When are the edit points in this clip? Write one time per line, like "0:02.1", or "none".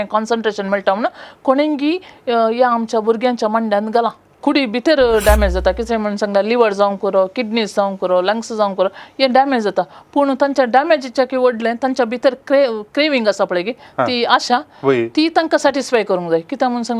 0:04.3